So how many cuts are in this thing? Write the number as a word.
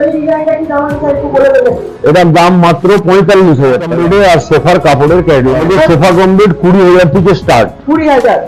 two